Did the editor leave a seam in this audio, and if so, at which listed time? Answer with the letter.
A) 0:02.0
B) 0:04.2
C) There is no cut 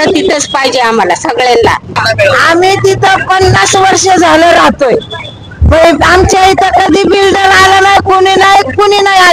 A